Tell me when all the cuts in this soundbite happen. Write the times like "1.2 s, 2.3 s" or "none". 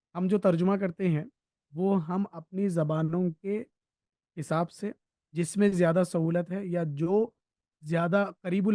none